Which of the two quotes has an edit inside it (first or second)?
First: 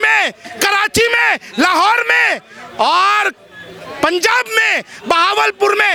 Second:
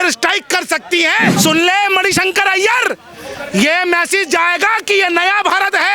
second